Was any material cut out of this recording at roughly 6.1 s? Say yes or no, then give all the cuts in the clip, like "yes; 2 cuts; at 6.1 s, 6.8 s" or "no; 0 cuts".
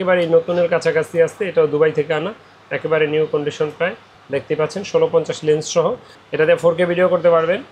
yes; 1 cut; at 6.1 s